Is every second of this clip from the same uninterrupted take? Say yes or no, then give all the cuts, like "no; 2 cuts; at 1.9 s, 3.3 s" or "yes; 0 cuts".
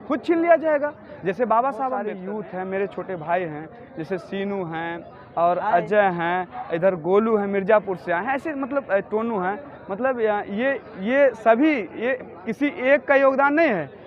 no; 1 cut; at 2.2 s